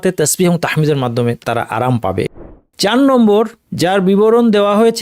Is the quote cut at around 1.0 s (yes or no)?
no